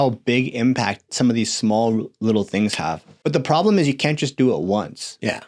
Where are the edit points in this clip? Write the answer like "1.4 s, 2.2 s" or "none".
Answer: 3.1 s